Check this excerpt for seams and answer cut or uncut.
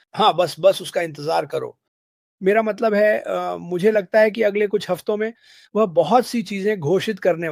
uncut